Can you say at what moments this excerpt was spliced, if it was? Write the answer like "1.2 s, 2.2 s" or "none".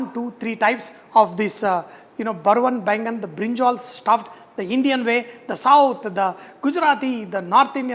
none